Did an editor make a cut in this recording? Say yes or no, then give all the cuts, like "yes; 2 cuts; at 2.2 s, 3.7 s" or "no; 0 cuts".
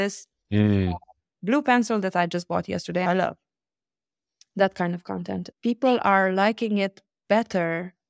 yes; 2 cuts; at 3.0 s, 5.6 s